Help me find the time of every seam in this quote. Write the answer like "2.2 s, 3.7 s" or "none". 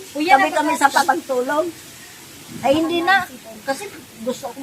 1.0 s